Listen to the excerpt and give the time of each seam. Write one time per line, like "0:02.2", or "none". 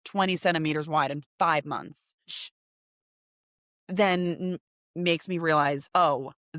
none